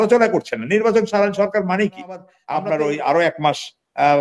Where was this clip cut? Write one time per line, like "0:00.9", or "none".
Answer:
0:02.3